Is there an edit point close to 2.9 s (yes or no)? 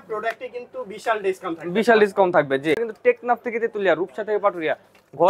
yes